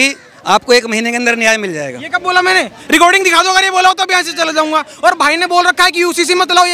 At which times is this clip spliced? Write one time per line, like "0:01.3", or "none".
none